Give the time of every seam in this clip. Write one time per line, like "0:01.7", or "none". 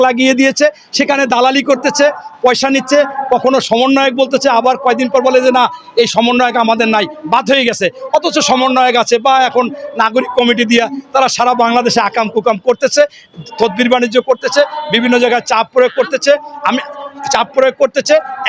none